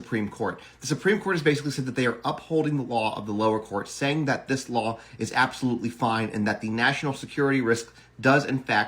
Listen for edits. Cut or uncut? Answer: uncut